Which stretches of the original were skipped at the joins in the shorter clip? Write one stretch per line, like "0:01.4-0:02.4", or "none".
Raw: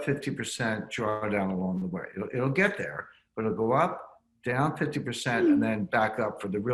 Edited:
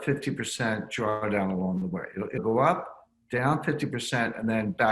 0:02.4-0:03.5